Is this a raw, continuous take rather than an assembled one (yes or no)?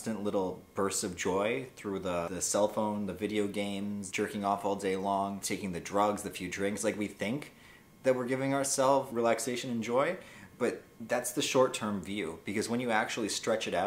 no